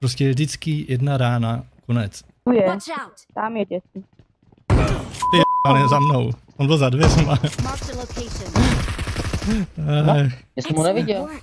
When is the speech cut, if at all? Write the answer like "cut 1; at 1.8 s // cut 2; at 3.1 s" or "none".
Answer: cut 1; at 2.5 s